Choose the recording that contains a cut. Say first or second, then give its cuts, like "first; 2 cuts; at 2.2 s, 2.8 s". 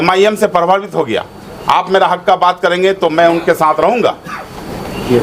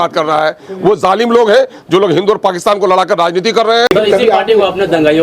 second; 1 cut; at 3.9 s